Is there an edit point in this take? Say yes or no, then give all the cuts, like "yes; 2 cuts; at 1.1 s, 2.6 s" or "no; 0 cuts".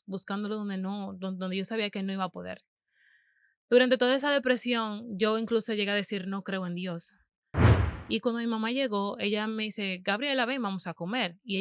yes; 1 cut; at 7.6 s